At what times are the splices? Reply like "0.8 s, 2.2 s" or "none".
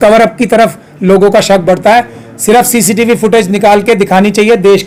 none